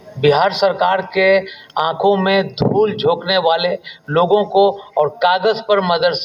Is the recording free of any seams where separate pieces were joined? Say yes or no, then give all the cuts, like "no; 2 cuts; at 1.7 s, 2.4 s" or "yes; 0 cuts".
yes; 0 cuts